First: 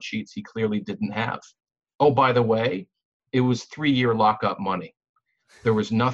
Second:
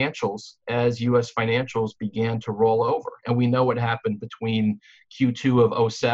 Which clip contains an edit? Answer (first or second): first